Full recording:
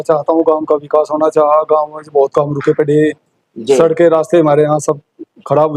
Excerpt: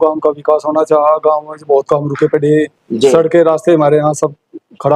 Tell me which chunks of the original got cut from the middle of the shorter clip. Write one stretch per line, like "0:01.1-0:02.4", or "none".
0:03.3-0:03.5

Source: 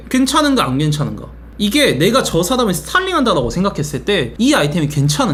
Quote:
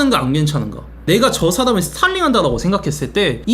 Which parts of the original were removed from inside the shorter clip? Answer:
0:01.5-0:02.0

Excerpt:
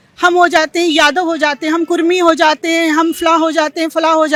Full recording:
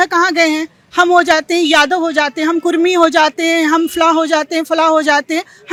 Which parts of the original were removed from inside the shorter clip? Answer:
none

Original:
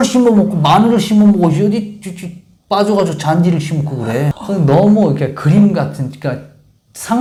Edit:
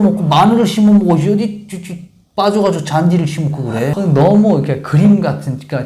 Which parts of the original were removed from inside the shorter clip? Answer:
0:04.3-0:04.4

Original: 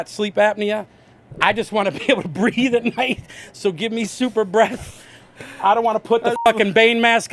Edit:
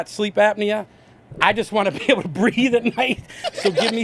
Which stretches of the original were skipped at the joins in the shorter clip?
none

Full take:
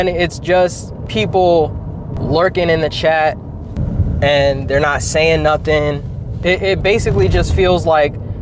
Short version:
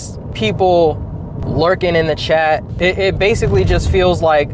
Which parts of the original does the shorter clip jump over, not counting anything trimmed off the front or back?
0:03.4-0:06.3

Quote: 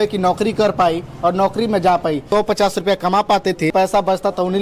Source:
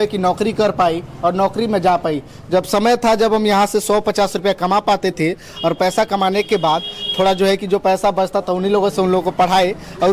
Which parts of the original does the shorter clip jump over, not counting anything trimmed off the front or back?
0:02.3-0:03.8
0:05.3-0:07.8

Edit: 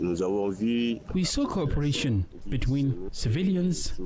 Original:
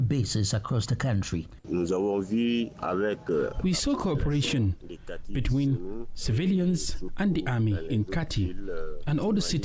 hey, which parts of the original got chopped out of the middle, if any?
0:02.8-0:03.5
0:04.9-0:05.2
0:05.9-0:06.1

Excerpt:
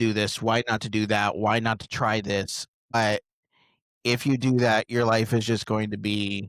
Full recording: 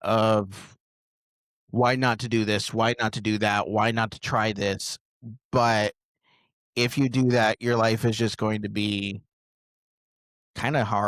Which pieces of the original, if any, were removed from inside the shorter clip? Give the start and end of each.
0:05.2-0:05.6

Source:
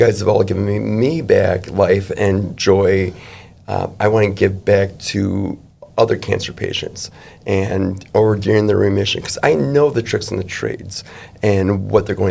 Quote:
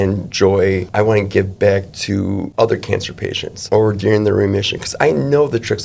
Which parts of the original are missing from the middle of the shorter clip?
0:03.1-0:03.9
0:05.5-0:05.9
0:07.0-0:08.0

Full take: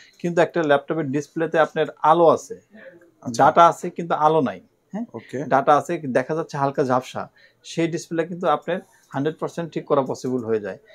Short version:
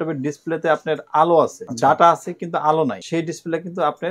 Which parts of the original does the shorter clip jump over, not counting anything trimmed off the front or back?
0:02.5-0:03.2
0:04.6-0:07.7

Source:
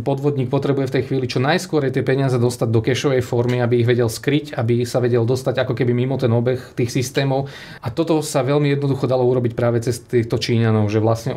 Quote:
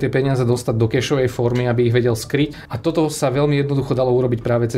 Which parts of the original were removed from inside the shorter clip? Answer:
0:04.5-0:07.7

